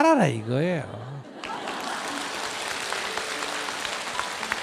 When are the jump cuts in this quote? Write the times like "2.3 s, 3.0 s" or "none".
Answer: 1.2 s